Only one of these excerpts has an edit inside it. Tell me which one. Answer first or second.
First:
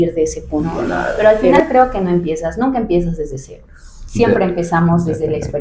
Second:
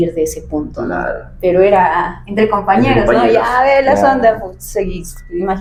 first